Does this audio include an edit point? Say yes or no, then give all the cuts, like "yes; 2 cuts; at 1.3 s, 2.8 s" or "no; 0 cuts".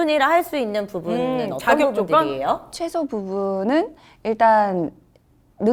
no; 0 cuts